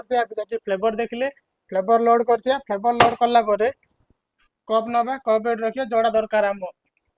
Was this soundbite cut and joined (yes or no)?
no